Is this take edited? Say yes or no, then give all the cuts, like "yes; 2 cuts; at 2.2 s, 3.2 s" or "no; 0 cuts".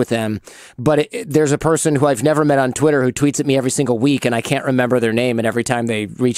no; 0 cuts